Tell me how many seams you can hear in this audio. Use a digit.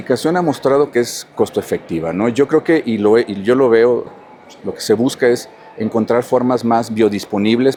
0